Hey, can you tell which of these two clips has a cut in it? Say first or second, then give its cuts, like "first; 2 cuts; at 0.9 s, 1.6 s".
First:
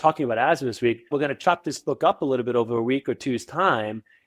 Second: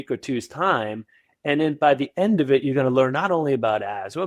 first; 1 cut; at 1.1 s